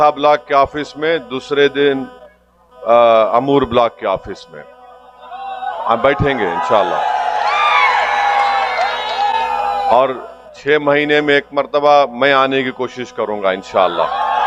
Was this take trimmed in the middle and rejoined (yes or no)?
no